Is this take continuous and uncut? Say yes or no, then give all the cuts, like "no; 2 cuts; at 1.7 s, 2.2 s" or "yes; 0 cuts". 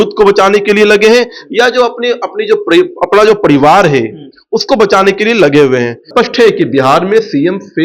no; 1 cut; at 6.0 s